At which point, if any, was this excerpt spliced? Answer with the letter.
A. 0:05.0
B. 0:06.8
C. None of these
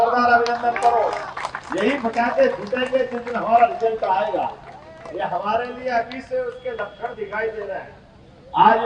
C